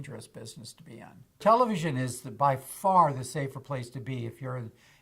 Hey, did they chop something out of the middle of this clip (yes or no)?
yes